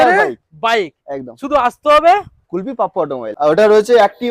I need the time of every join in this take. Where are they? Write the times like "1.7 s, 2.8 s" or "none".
3.3 s